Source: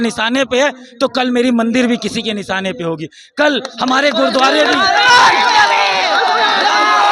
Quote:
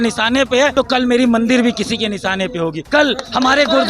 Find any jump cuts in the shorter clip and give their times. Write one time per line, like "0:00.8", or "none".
0:00.7
0:02.8